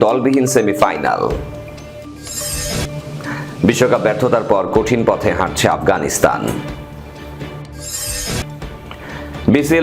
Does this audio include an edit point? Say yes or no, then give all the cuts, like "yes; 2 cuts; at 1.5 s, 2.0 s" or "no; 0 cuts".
yes; 1 cut; at 1.5 s